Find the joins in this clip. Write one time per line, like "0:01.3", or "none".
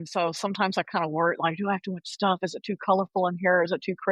none